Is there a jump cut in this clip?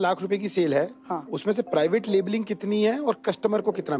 no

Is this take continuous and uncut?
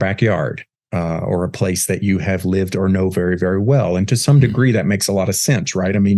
yes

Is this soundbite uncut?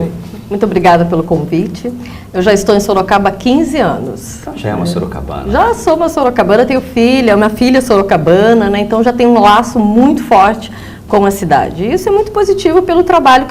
no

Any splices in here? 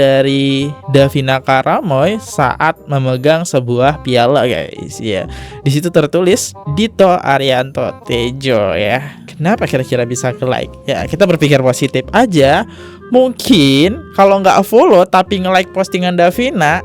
no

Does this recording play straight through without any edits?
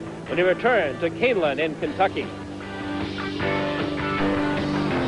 yes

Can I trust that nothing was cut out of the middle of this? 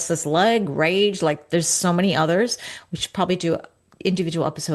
yes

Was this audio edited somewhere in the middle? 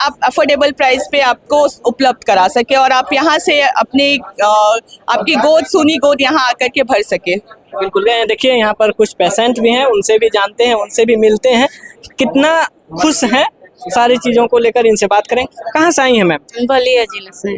no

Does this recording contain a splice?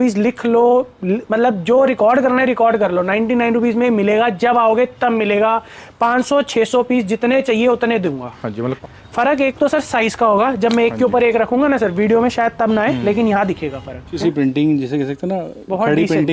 yes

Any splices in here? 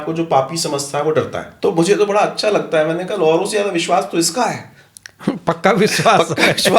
yes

